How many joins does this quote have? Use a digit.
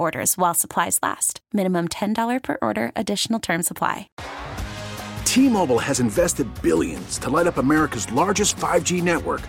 1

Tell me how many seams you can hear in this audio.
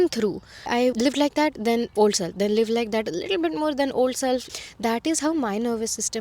2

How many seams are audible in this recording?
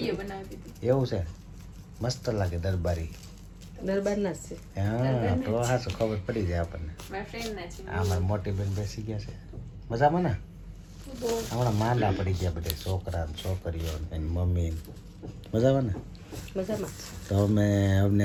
0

